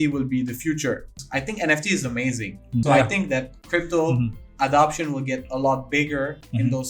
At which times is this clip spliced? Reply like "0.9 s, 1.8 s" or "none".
1.2 s, 2.8 s